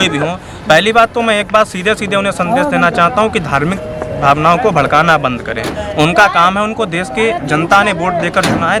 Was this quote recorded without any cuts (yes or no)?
yes